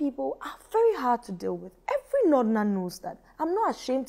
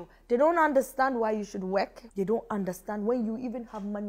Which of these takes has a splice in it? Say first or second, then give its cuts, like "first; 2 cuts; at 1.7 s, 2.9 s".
second; 1 cut; at 2.0 s